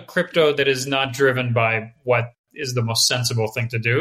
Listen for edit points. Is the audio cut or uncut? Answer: uncut